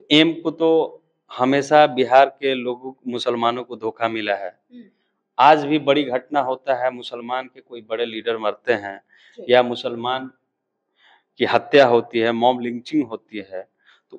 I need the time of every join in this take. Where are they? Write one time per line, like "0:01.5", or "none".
none

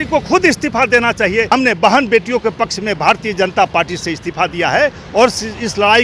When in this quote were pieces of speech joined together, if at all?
0:01.5

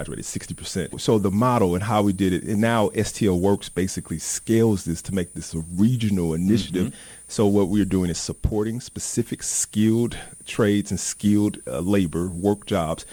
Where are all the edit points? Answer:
none

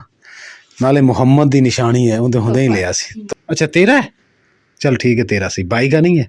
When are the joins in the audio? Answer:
0:03.1

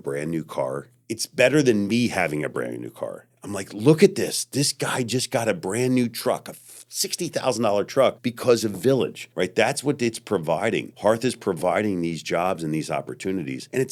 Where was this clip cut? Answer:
none

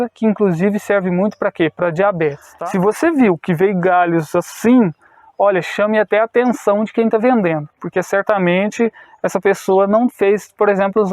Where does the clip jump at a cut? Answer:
0:02.4

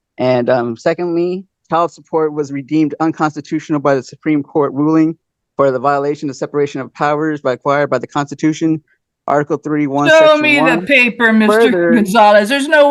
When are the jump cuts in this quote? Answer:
0:01.6

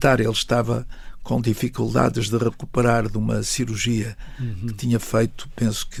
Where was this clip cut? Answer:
none

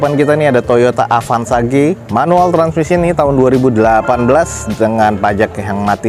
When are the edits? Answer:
none

